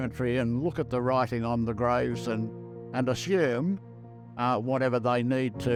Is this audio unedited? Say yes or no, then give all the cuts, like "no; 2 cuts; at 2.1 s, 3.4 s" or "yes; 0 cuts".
yes; 0 cuts